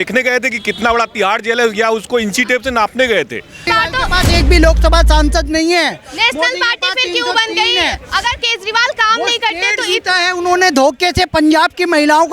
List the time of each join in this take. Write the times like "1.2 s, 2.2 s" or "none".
3.6 s